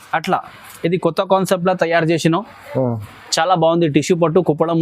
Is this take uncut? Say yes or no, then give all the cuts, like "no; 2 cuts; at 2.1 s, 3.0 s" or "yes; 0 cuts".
yes; 0 cuts